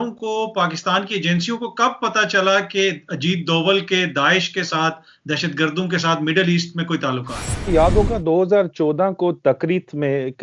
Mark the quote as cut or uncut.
cut